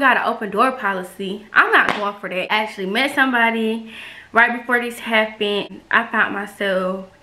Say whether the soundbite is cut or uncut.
cut